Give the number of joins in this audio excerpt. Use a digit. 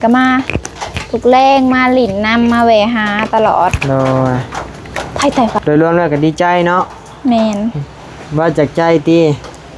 1